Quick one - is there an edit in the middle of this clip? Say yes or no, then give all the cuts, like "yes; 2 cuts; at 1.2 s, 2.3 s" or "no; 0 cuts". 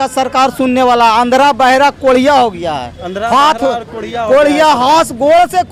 no; 0 cuts